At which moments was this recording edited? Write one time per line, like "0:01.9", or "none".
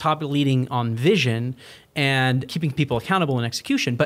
0:02.5